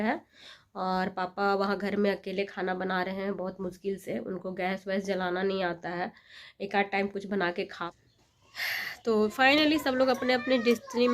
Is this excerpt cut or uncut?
cut